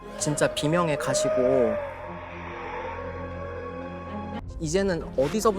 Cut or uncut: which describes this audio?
cut